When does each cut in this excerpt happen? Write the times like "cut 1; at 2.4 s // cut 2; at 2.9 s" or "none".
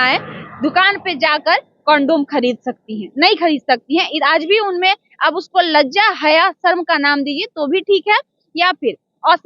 none